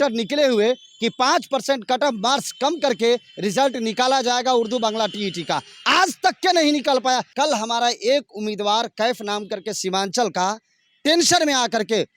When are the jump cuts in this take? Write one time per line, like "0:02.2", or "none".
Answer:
0:07.3